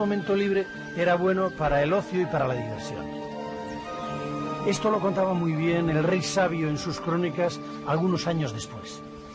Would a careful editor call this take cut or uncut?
cut